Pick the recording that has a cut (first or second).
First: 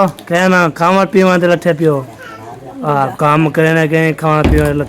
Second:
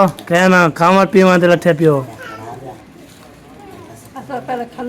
first